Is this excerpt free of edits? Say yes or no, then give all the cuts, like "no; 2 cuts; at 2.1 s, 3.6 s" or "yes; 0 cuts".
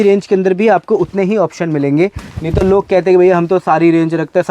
yes; 0 cuts